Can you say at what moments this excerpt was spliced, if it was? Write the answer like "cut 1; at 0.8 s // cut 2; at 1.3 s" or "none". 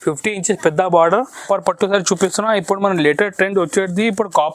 cut 1; at 1.4 s